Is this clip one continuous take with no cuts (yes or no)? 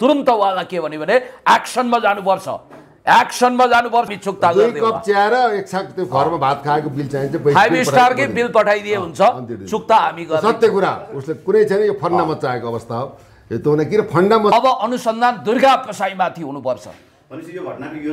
no